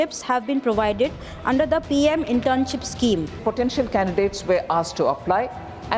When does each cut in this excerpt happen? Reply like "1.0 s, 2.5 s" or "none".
3.4 s